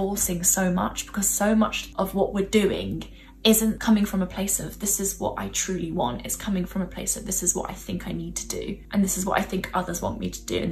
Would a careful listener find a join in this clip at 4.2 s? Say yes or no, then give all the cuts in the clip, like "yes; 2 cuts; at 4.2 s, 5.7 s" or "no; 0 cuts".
no; 2 cuts; at 1.8 s, 8.8 s